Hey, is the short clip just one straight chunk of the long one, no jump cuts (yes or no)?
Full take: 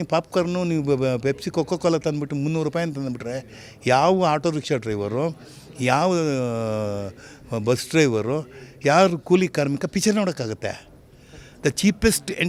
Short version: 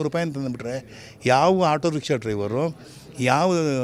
yes